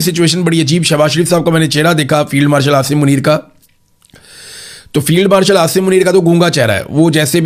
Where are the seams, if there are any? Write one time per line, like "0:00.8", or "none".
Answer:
none

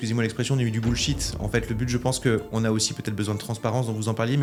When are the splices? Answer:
none

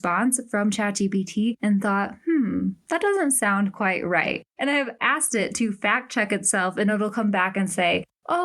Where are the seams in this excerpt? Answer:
0:04.8

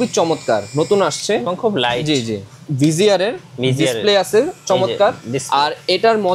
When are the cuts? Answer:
0:02.6

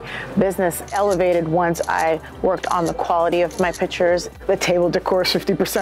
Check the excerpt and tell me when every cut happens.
0:00.9
0:04.3

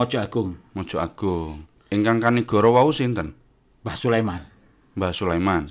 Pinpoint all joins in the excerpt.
0:01.6

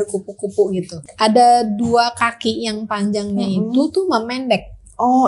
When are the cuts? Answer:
0:01.0

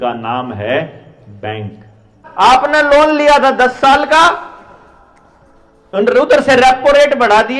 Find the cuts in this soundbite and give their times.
0:02.2

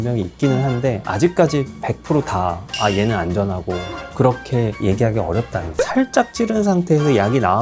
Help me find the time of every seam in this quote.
0:05.6

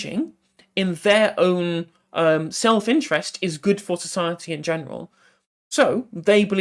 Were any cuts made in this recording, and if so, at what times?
none

